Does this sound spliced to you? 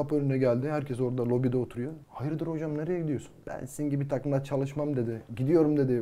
yes; 2 cuts; at 2.1 s, 3.4 s

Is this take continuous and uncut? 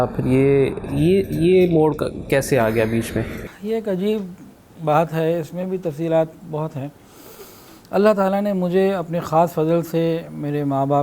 yes; 0 cuts

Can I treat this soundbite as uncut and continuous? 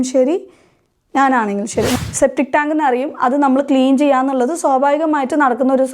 no; 1 cut; at 1.9 s

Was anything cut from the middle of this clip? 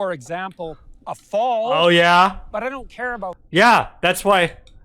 no; 0 cuts

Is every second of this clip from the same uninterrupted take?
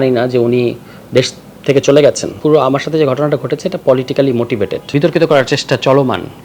no; 2 cuts; at 2.3 s, 4.9 s

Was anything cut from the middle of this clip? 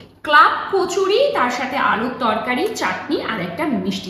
no; 0 cuts

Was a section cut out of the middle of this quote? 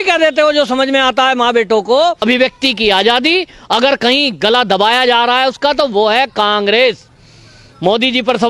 yes; 1 cut; at 2.2 s

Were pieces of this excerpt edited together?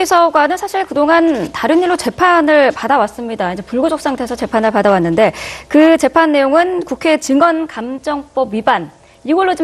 no; 0 cuts

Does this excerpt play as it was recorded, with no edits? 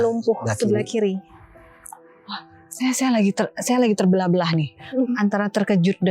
yes; 0 cuts

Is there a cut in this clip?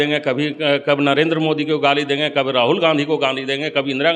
no; 0 cuts

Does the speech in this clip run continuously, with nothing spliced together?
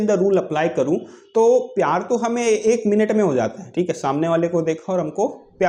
yes; 0 cuts

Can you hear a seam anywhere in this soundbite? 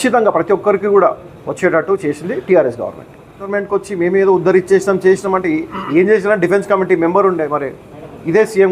yes; 1 cut; at 3.5 s

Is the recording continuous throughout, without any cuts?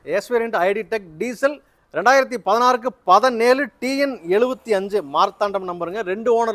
yes; 0 cuts

